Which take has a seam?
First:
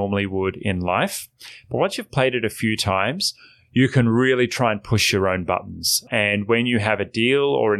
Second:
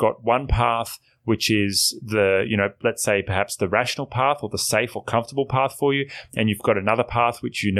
first; 1 cut; at 6.1 s

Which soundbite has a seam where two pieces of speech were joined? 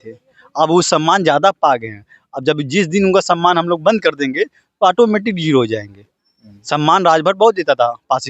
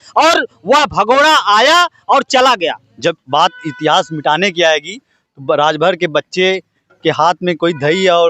second; 1 cut; at 2.9 s

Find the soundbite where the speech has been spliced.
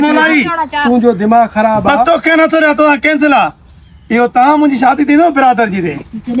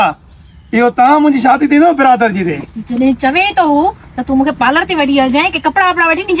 first; 1 cut; at 2.1 s

